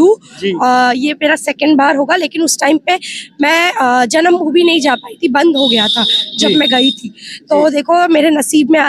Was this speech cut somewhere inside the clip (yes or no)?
no